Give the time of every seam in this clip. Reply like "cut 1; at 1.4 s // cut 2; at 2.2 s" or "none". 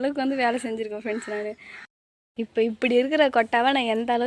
cut 1; at 1.9 s